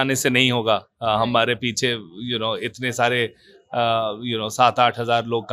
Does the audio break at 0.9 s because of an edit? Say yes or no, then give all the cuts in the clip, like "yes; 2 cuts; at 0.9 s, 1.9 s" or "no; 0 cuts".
no; 0 cuts